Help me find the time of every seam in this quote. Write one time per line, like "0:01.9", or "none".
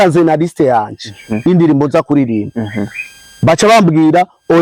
none